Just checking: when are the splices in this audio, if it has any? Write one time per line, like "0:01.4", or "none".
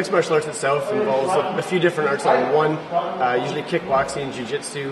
none